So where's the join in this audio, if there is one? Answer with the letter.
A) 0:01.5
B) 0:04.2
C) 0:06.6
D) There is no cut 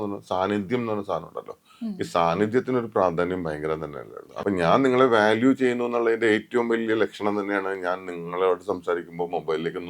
B